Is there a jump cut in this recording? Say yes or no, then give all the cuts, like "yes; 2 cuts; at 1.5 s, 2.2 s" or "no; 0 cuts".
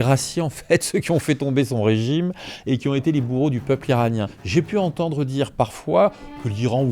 yes; 1 cut; at 4.3 s